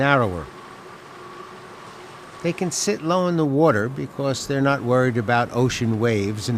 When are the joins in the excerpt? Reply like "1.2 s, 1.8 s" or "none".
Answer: 1.0 s